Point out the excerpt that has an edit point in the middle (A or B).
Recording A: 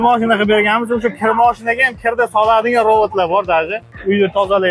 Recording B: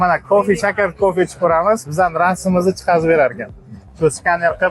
B